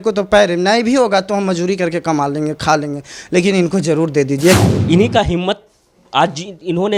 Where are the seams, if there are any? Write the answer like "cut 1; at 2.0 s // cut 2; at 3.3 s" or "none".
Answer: cut 1; at 4.6 s